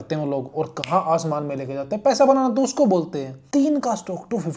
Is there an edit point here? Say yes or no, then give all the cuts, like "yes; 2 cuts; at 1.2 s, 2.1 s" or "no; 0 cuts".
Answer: yes; 1 cut; at 3.4 s